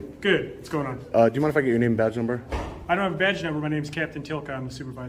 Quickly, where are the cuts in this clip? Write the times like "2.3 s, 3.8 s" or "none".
none